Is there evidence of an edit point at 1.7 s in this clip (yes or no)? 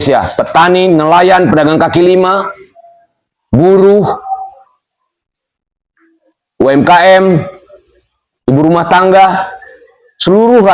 no